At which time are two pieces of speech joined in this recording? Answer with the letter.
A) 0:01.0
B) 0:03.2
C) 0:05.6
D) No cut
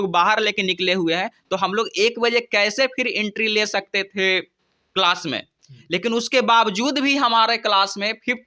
D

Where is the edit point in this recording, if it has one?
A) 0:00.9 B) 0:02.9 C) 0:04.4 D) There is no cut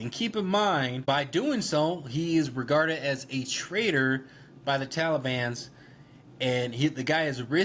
A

